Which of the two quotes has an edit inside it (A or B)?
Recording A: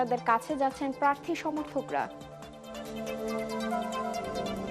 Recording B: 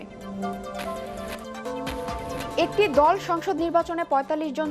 B